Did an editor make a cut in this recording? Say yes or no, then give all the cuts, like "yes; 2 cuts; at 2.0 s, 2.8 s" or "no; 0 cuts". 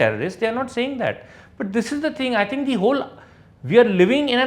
no; 0 cuts